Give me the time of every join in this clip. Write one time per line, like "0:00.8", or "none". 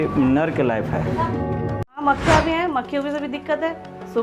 0:02.0